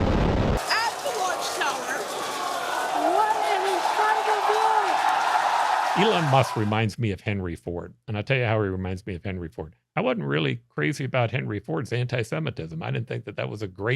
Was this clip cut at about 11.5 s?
no; 1 cut; at 6.0 s

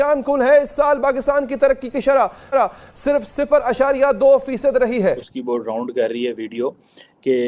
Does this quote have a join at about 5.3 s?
yes; 1 cut; at 5.3 s

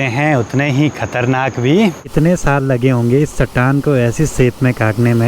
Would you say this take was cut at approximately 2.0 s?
yes; 1 cut; at 2.0 s

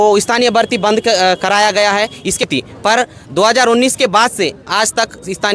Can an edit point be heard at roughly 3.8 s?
no; 1 cut; at 2.4 s

